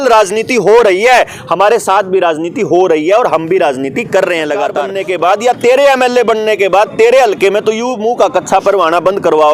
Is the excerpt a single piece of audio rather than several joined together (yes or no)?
no